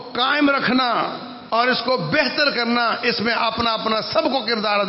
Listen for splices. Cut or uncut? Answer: uncut